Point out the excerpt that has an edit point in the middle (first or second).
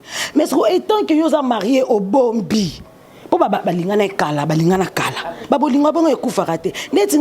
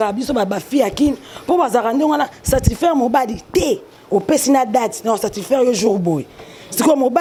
first